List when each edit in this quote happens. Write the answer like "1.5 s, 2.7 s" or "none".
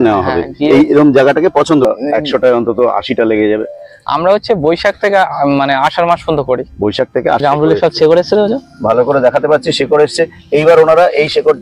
1.9 s, 7.4 s